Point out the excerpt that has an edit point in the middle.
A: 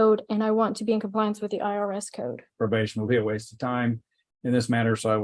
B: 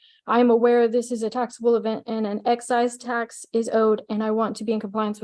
A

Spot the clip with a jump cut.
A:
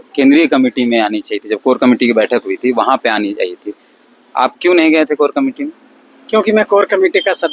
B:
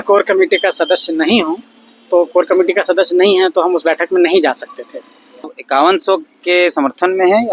B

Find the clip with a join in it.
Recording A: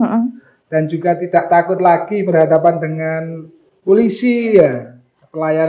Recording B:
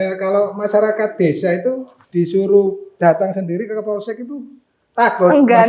B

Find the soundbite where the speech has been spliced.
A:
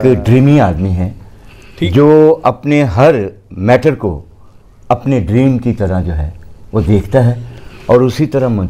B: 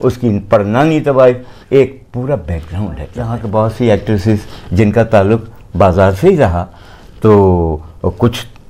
B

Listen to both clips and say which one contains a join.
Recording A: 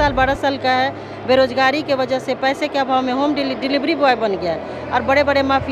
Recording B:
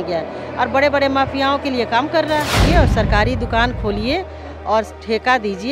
B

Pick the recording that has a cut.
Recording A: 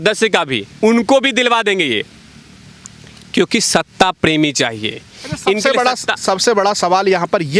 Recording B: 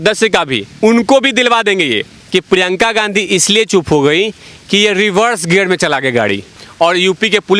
B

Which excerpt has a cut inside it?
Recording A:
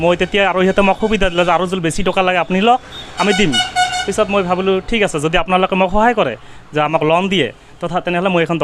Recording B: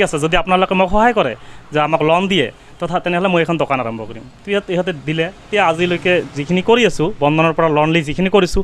B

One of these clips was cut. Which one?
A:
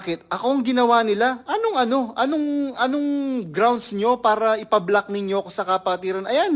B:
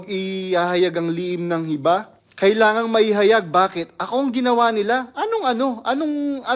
B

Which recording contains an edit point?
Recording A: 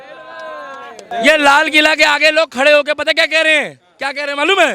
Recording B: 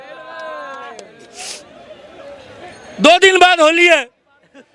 A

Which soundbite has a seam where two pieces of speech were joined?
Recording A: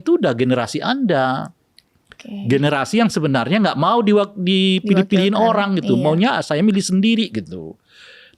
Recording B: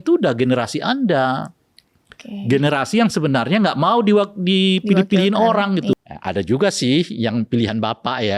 B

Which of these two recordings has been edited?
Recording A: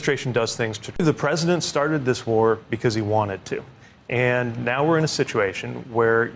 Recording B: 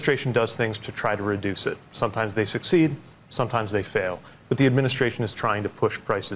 A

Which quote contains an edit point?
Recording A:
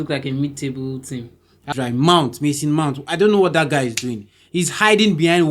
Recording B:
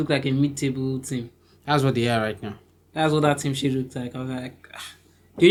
A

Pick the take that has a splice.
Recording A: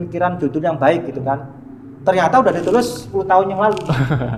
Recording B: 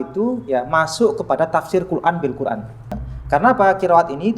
B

